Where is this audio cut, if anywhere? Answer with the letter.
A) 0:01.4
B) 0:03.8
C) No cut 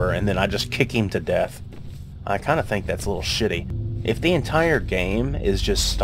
B